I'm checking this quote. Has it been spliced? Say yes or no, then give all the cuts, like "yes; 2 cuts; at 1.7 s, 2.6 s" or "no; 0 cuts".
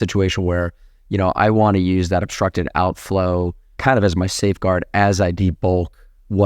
yes; 1 cut; at 3.8 s